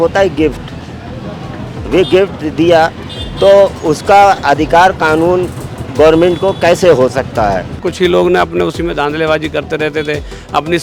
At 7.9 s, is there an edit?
yes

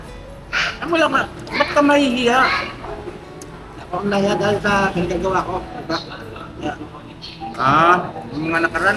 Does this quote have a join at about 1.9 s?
no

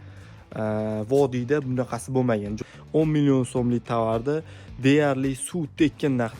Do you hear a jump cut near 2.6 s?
yes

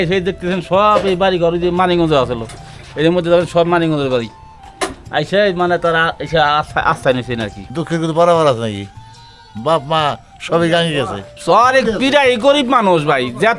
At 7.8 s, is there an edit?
yes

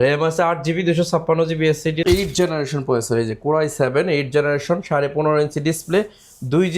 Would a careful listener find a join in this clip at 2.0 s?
yes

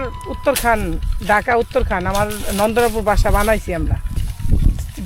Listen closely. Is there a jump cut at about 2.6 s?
no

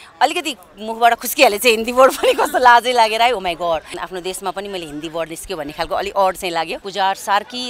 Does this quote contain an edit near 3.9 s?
yes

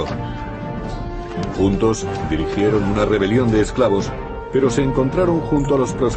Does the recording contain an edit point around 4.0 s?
no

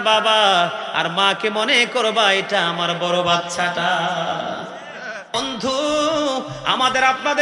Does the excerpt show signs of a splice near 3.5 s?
no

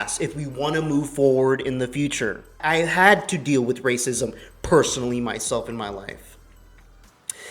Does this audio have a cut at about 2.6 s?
yes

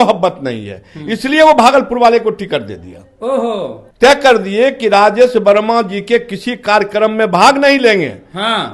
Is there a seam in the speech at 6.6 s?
no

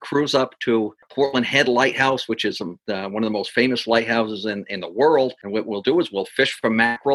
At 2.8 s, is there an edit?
no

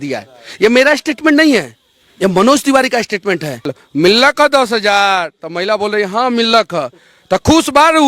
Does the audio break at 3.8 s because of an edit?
yes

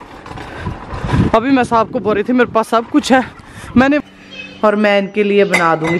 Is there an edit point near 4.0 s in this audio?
yes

